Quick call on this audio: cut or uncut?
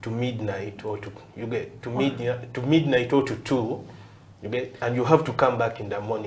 uncut